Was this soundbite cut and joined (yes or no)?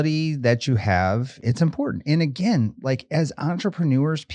yes